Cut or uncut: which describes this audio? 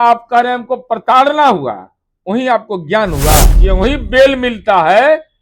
cut